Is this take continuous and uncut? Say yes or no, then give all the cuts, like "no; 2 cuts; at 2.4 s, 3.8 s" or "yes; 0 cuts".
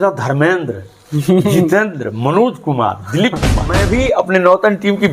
no; 1 cut; at 3.8 s